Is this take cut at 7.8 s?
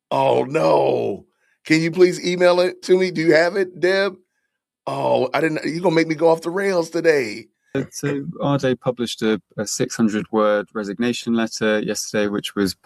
yes; 1 cut; at 7.8 s

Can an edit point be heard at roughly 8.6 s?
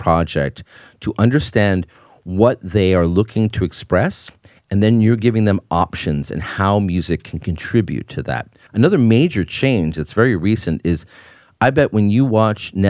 yes; 1 cut; at 8.6 s

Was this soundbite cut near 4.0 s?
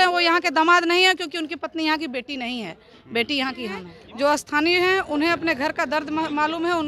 yes; 1 cut; at 4.0 s

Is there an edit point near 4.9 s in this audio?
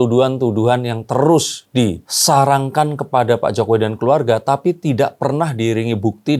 no; 0 cuts

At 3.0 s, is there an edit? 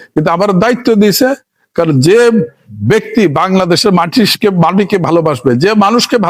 no; 0 cuts

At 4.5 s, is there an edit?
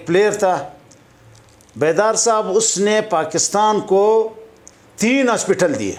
no; 0 cuts

